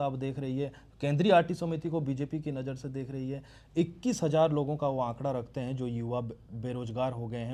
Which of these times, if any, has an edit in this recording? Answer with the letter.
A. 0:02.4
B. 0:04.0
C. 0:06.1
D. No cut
D